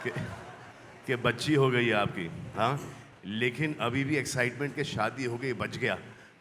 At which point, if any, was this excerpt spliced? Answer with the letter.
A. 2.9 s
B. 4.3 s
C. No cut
C